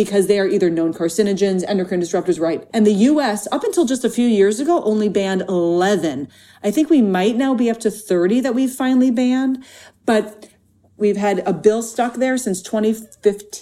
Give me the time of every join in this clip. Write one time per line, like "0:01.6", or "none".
0:02.6
0:10.9